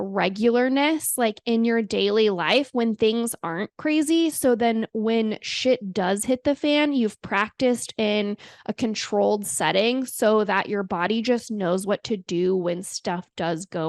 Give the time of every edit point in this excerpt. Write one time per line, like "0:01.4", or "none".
none